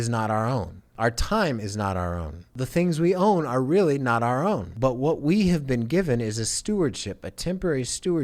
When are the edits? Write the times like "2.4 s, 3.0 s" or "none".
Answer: 0.9 s, 2.5 s, 4.7 s